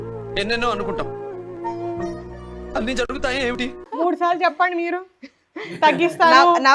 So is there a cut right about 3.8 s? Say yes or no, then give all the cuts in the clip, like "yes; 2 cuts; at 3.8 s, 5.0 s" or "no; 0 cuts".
yes; 1 cut; at 3.8 s